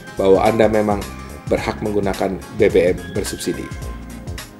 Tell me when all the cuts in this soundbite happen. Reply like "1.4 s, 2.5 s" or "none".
3.7 s